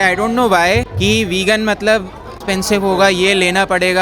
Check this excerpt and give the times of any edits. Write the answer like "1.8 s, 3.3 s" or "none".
0.9 s, 2.4 s